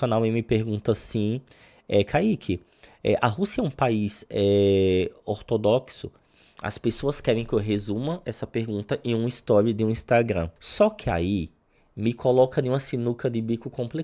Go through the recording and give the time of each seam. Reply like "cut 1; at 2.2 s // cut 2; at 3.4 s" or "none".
cut 1; at 10.6 s